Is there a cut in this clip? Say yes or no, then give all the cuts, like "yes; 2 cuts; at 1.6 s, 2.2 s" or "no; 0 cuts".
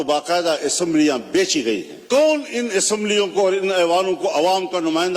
yes; 1 cut; at 1.9 s